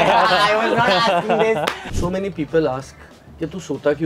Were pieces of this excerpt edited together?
yes; 1 cut; at 1.8 s

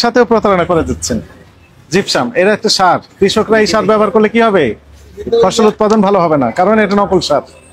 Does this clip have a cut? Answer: no; 0 cuts

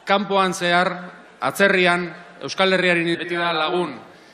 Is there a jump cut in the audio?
no; 0 cuts

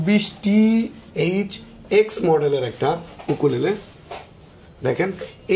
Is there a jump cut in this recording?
no; 0 cuts

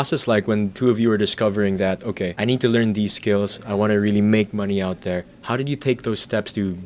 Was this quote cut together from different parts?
no; 0 cuts

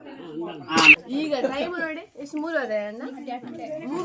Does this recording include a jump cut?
yes; 1 cut; at 1.0 s

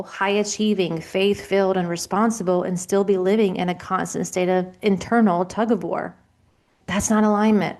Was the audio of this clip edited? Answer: yes; 1 cut; at 6.8 s

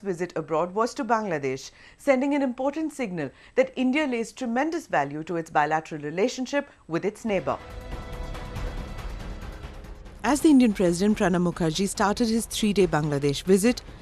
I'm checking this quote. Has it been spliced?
yes; 1 cut; at 10.3 s

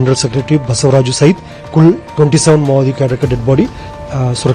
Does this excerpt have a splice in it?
no; 0 cuts

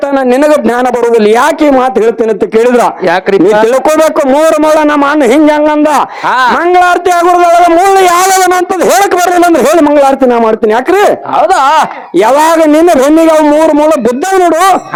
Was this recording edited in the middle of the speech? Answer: no; 0 cuts

